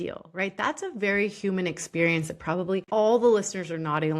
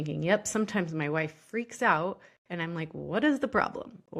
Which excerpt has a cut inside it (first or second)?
first